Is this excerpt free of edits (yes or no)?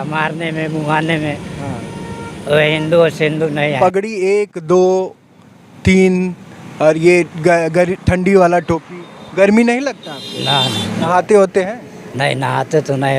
no